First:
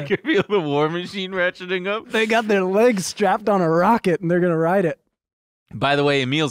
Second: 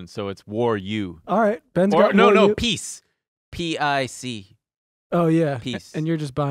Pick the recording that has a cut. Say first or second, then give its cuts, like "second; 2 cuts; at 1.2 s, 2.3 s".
second; 1 cut; at 1.2 s